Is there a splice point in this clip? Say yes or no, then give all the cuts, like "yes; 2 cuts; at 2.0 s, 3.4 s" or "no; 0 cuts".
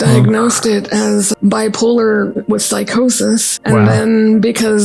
yes; 3 cuts; at 1.3 s, 2.4 s, 3.5 s